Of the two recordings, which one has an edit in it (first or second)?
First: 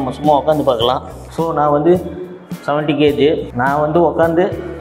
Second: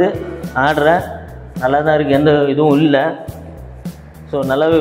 first